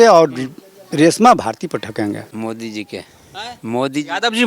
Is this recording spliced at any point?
yes; 1 cut; at 2.3 s

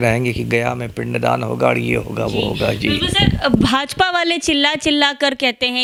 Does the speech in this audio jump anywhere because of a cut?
no; 0 cuts

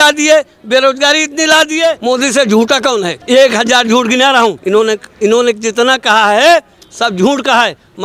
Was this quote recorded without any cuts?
no; 3 cuts; at 2.0 s, 3.1 s, 4.9 s

